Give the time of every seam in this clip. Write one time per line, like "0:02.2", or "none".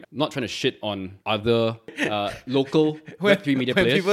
0:01.1
0:01.9

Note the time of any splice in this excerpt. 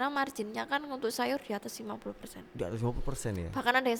none

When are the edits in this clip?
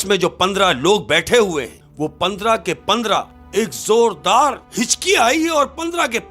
0:01.8
0:03.4
0:04.6

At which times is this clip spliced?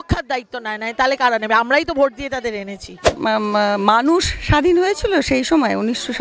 0:03.1

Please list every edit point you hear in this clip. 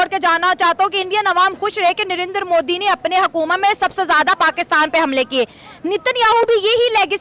none

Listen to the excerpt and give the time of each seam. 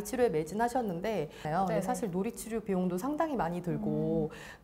0:01.4

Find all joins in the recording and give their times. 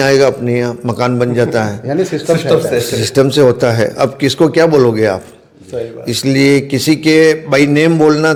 none

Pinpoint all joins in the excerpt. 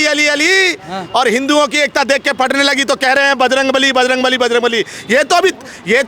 none

